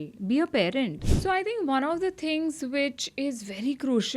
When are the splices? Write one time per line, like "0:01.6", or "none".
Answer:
0:01.0